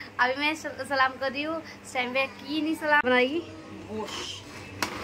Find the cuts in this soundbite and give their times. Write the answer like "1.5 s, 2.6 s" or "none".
3.0 s